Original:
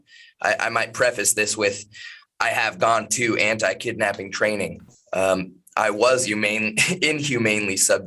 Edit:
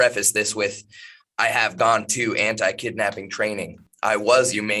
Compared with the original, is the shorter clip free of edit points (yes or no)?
no